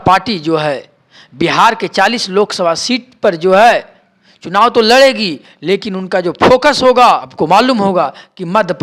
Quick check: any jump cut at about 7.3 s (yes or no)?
yes